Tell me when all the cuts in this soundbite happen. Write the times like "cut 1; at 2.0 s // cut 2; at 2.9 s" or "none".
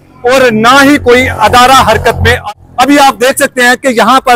cut 1; at 2.5 s